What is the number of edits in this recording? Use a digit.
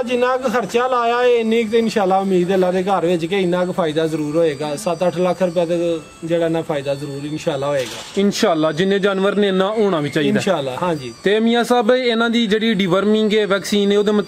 0